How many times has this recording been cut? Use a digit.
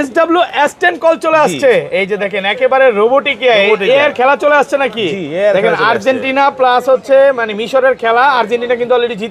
0